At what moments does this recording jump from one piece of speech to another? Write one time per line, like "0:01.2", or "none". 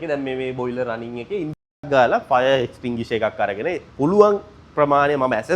0:01.8